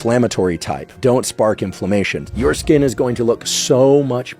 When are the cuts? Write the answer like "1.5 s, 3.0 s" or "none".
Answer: 0.9 s, 2.2 s